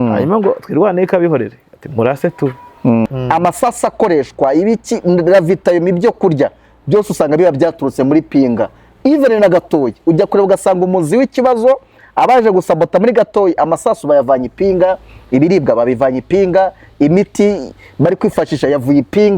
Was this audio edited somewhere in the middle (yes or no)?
yes